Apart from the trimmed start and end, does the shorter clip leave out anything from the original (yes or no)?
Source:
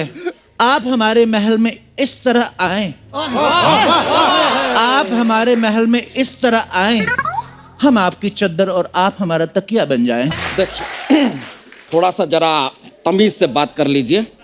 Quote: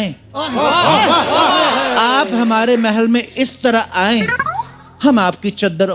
no